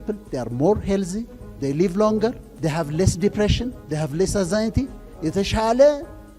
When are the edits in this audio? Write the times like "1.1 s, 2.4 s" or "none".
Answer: 2.5 s